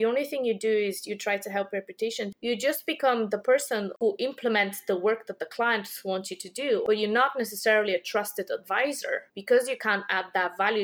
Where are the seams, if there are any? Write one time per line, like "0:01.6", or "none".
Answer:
0:02.3
0:04.0
0:06.8

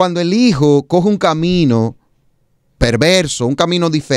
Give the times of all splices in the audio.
none

